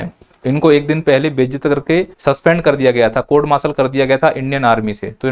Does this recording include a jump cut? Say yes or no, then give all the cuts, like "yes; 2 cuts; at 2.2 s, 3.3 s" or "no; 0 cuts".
yes; 1 cut; at 2.1 s